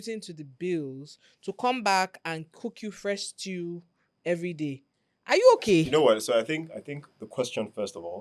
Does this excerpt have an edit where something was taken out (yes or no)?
yes